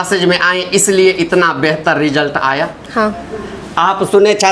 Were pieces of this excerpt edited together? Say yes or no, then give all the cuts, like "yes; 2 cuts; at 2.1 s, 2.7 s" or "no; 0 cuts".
no; 0 cuts